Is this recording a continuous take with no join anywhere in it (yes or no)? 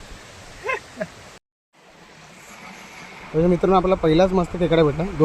no